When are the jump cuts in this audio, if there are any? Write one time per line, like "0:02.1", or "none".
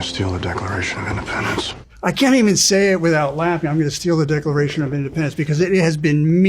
0:01.8